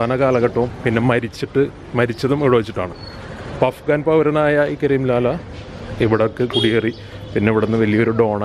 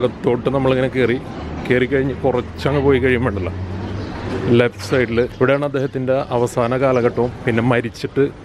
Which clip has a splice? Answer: second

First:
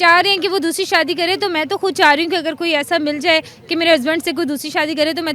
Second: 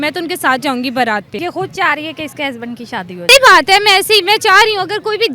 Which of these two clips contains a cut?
second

